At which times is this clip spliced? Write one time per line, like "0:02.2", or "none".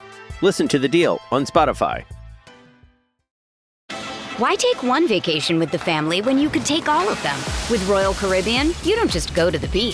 0:03.9